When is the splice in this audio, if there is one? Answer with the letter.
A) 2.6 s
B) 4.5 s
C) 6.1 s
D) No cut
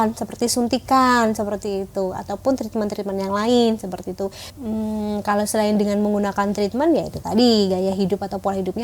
B